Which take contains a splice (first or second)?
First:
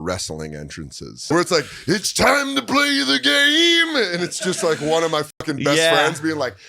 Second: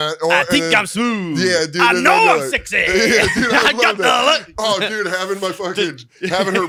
first